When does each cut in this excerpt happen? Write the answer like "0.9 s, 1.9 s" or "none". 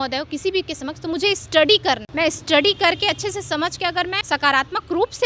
2.1 s, 4.2 s